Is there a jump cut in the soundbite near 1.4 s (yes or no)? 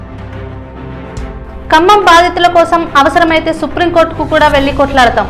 yes